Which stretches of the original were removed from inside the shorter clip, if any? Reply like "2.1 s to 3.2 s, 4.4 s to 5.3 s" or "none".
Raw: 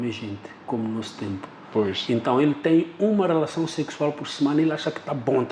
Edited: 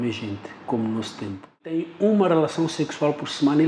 1.9 s to 2.9 s